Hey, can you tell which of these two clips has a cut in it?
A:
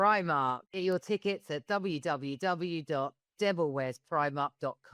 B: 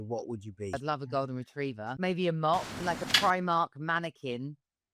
B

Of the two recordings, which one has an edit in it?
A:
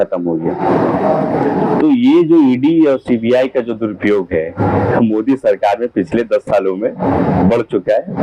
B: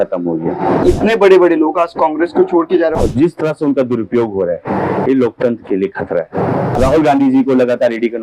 B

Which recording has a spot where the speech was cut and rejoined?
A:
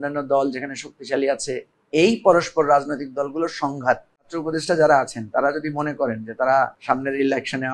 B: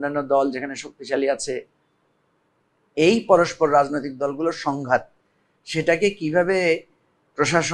A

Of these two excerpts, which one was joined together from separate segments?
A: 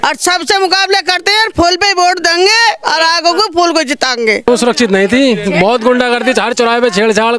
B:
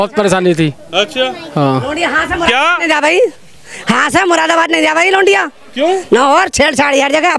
A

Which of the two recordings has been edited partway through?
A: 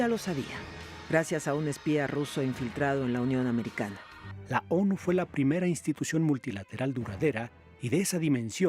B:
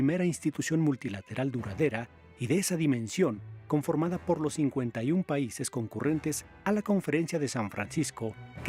A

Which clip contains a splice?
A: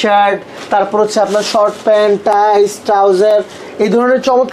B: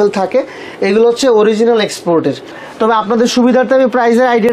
B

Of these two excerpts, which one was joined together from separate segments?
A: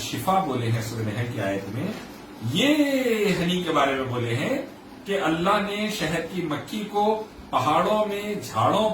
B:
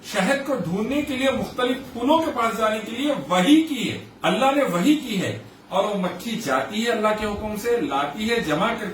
B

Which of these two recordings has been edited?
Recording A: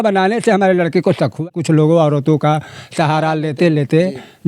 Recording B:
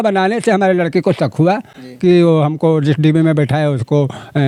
A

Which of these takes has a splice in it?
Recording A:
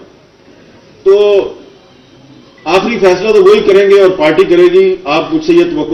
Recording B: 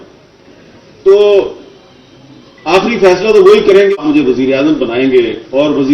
B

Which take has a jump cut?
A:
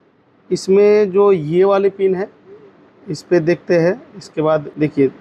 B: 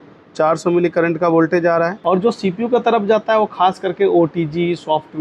B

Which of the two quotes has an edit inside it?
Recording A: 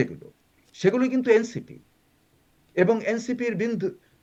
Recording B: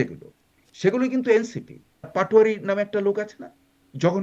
B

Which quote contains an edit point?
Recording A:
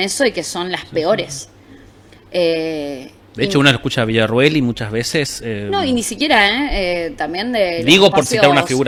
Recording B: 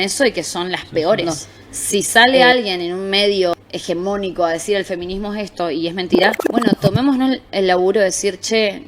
B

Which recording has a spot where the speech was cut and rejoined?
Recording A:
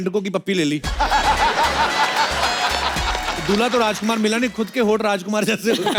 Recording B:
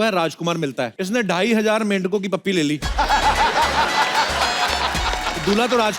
B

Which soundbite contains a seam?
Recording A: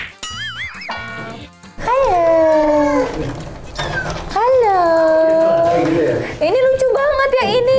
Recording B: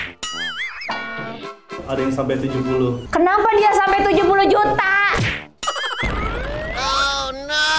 B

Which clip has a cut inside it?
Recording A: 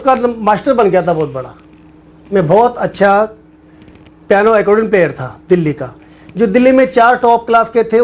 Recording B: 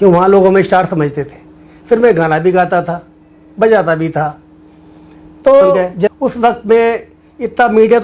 B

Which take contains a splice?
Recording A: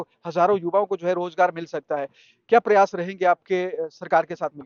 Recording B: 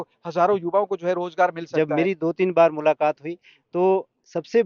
B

